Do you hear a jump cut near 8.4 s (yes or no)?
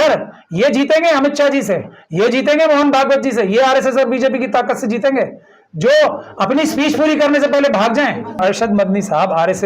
yes